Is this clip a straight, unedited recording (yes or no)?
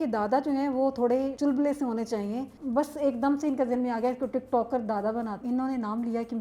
no